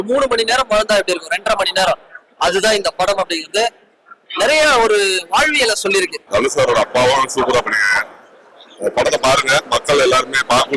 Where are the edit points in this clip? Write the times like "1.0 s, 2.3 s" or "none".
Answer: 6.2 s